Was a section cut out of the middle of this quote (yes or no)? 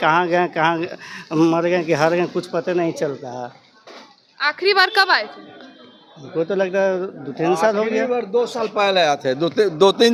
no